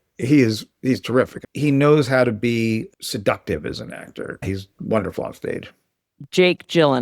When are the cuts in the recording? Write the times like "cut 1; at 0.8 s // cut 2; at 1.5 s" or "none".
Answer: cut 1; at 1.5 s // cut 2; at 4.2 s